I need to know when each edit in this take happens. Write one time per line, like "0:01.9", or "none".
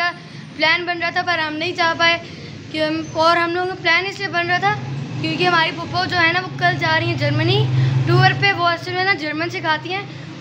none